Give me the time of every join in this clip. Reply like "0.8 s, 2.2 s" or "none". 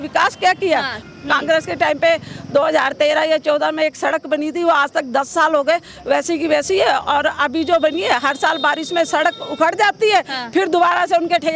1.0 s